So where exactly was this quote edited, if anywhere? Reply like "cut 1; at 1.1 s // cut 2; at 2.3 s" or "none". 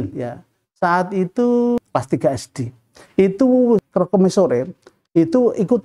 cut 1; at 1.8 s // cut 2; at 3.8 s